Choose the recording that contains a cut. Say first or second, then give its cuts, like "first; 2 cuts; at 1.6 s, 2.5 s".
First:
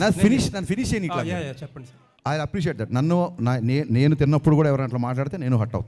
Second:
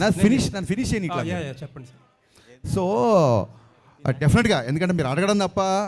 first; 1 cut; at 2.0 s